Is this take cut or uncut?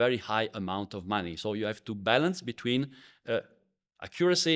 uncut